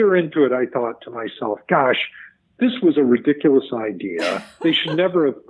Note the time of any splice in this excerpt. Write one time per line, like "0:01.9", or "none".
none